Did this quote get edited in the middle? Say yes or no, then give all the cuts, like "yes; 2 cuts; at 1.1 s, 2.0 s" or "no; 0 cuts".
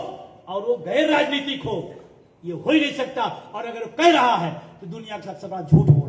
no; 0 cuts